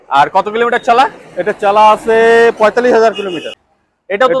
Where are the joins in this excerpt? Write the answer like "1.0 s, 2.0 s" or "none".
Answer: 3.4 s